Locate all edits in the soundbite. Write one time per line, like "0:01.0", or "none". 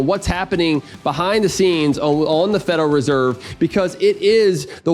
none